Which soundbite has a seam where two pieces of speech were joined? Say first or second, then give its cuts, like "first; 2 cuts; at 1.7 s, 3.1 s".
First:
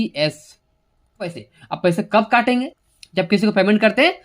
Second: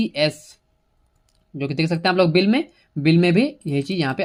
first; 1 cut; at 1.5 s